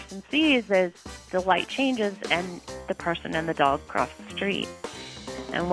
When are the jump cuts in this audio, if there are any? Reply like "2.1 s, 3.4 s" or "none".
1.1 s